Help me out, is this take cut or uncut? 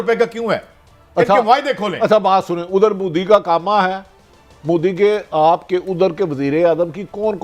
uncut